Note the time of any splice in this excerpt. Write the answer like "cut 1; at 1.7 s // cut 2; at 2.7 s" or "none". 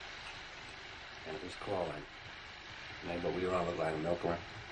cut 1; at 3.4 s

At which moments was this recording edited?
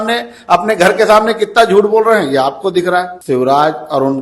cut 1; at 3.1 s

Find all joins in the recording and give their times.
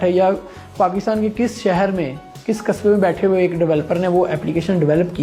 none

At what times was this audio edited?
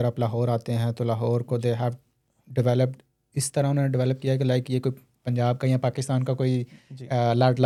none

